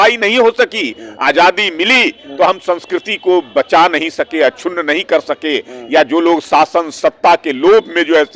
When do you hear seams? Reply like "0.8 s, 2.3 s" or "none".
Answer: none

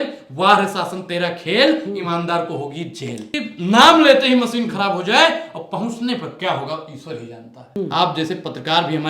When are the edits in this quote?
3.4 s, 7.8 s

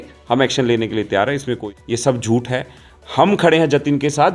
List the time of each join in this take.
2.0 s

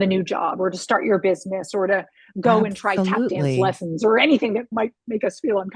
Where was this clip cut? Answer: 4.7 s

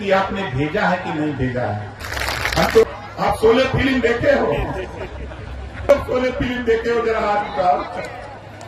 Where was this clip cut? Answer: 2.8 s, 5.9 s

